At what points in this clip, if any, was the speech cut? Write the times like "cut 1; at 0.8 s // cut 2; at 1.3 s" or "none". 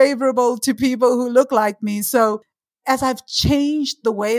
cut 1; at 2.7 s